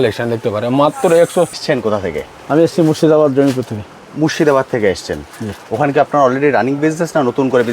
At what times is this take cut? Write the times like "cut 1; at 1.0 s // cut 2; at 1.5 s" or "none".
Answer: cut 1; at 1.5 s